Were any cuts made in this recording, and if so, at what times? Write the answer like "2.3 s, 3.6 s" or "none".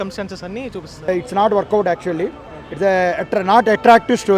1.1 s